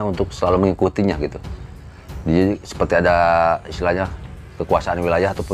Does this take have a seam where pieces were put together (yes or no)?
no